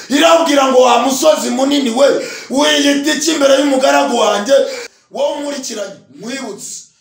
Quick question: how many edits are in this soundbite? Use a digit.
1